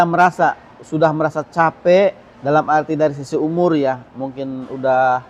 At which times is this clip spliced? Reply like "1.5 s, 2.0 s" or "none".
none